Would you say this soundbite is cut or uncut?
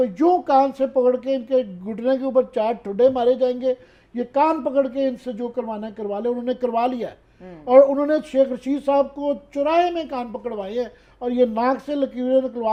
uncut